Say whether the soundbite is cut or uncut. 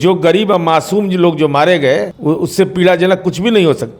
cut